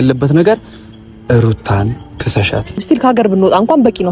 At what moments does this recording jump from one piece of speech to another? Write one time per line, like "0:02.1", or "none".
0:02.7